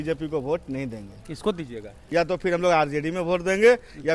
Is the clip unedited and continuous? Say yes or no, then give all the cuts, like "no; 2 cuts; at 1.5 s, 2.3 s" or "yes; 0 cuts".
no; 1 cut; at 2.0 s